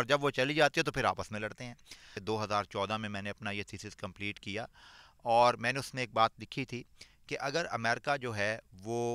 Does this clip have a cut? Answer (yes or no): yes